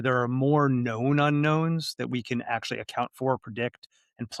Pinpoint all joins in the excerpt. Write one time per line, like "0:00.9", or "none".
none